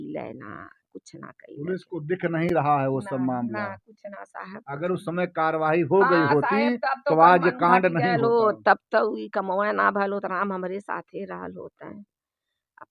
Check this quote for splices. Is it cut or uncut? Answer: uncut